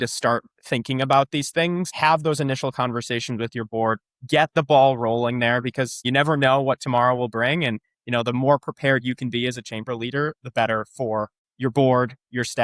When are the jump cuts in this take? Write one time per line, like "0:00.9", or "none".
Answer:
0:01.9
0:06.1
0:11.4